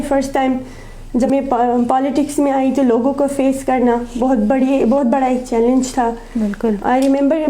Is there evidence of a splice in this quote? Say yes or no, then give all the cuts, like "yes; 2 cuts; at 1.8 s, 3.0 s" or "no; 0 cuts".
yes; 1 cut; at 1.3 s